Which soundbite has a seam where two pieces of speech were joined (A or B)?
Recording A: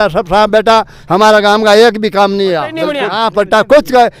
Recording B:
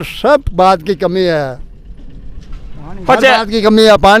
A